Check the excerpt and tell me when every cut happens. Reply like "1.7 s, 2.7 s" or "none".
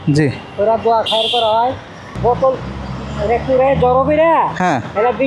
2.1 s

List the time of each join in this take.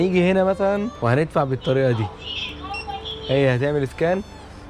0.9 s

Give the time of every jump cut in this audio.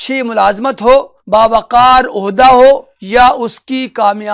1.2 s, 2.9 s

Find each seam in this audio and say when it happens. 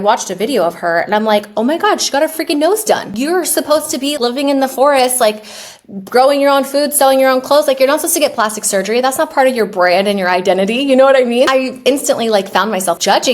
3.1 s, 4.1 s, 11.5 s

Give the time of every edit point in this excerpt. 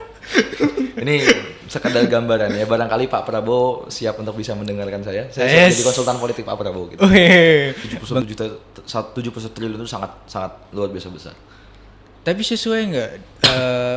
8.2 s

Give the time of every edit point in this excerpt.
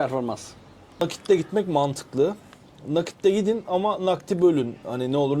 1.0 s

